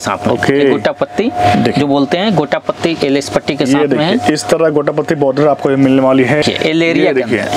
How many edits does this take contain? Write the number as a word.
one